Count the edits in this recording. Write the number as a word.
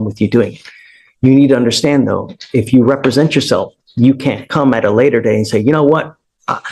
zero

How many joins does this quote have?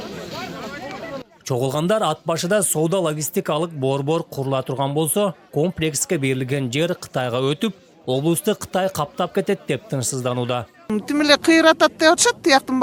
zero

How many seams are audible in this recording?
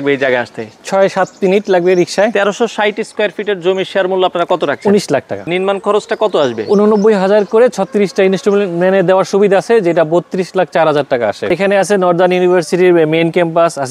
three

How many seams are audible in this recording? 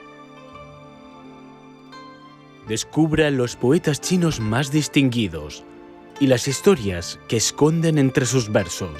one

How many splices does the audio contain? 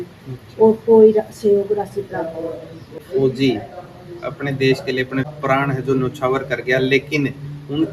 two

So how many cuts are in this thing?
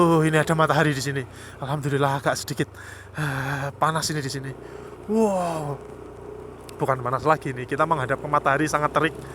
zero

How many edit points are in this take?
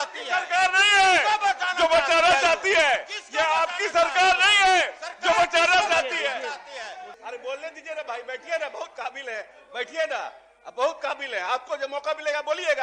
one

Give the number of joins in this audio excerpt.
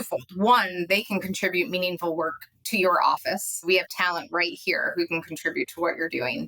one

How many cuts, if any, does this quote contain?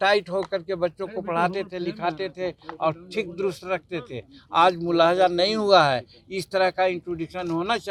zero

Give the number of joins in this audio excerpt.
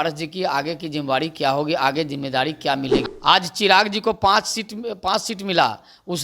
one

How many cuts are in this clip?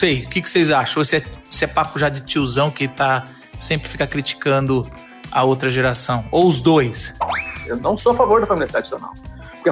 one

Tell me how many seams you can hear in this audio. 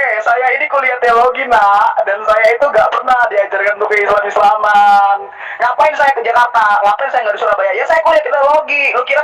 zero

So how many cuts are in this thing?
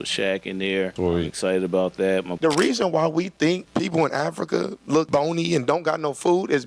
four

